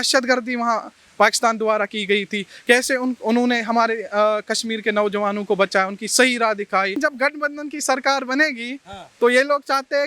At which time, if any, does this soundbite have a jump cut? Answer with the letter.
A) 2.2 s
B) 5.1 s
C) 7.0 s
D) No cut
C